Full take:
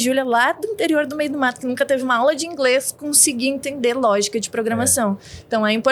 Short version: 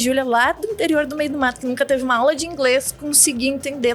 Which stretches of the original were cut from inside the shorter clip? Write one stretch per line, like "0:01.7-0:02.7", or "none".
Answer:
none